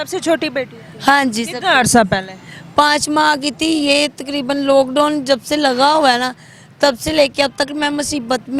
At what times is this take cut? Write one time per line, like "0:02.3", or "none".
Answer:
none